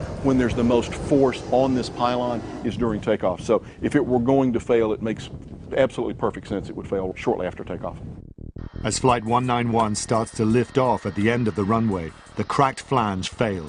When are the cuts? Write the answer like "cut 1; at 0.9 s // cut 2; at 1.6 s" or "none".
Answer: cut 1; at 1.0 s